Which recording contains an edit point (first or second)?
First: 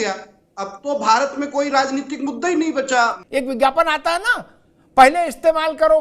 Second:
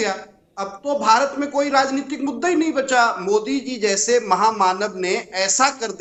first